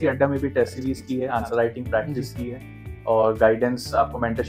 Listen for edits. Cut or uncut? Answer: uncut